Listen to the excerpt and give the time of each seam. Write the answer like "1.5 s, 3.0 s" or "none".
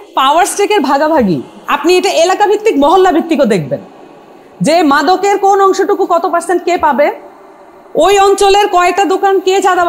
1.6 s